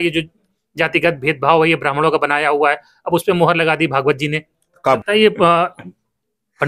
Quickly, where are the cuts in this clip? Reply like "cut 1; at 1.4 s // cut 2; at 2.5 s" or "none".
cut 1; at 5.0 s